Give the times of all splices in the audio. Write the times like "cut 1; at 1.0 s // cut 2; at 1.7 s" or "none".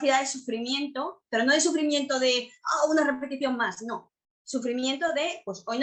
none

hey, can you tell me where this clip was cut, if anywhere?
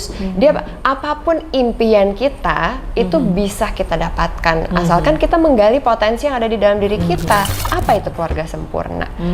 cut 1; at 7.6 s

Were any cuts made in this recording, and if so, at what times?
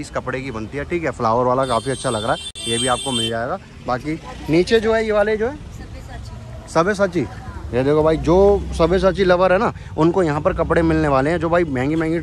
none

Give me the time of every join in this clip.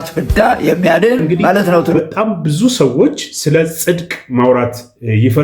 cut 1; at 2.0 s

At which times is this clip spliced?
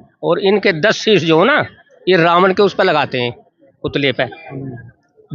none

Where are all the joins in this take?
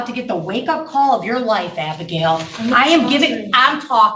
none

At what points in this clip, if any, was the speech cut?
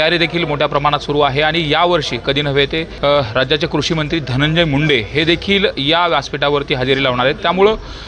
cut 1; at 2.9 s

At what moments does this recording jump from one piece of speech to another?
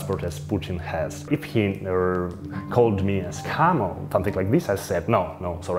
cut 1; at 1.2 s

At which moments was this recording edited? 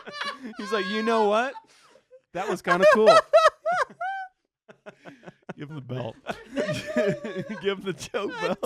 none

